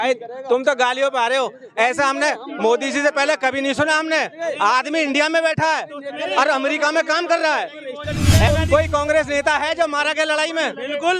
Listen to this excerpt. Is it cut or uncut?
cut